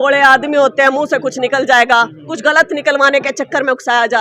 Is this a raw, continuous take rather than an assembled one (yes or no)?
yes